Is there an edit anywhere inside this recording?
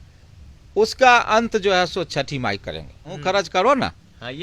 yes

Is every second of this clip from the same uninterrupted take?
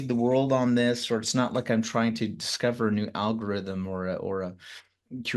yes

